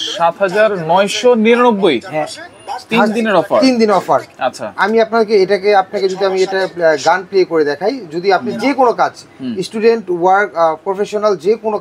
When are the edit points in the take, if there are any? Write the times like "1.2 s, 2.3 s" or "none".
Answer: none

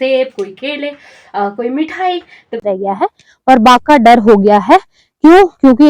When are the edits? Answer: 2.6 s

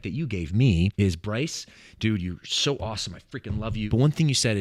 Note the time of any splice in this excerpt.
0.9 s, 3.9 s

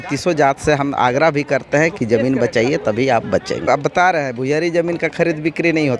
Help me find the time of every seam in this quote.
3.7 s

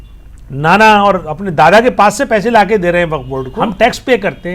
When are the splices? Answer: 3.5 s

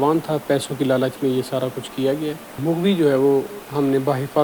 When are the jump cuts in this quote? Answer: 2.6 s

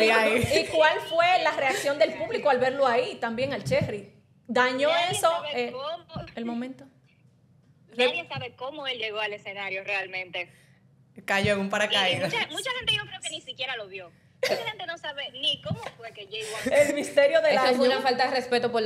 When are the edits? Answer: none

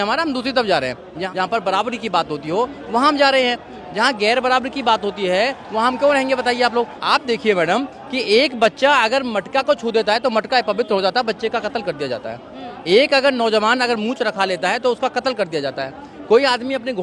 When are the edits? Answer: 1.3 s, 7.0 s

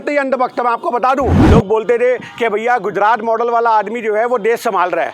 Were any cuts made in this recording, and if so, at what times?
1.4 s

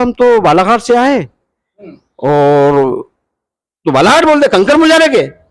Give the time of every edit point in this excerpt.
none

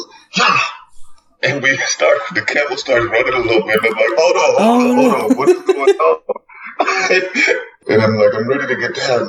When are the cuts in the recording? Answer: 7.7 s

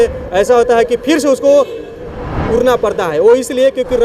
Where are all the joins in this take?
none

